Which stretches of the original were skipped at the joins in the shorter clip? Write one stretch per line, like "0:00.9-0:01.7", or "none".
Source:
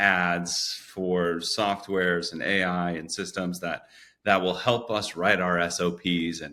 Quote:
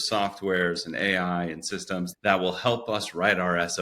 0:03.6-0:04.1